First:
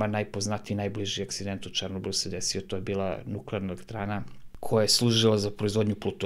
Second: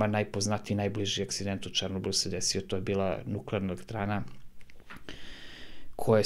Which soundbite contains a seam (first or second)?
first